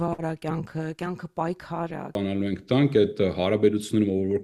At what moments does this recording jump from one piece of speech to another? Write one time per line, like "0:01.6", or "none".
0:02.2